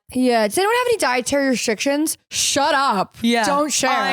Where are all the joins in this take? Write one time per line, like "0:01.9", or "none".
none